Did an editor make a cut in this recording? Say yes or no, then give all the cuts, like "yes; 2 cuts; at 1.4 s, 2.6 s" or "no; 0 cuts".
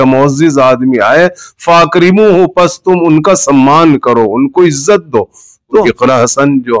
yes; 1 cut; at 5.8 s